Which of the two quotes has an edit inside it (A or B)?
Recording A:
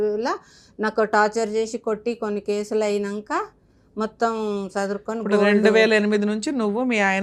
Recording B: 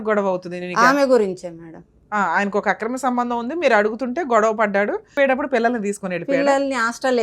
B